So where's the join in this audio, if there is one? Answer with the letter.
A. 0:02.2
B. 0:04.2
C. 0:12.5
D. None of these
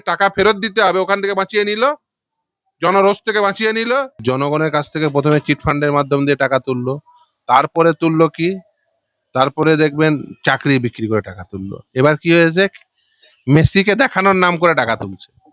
B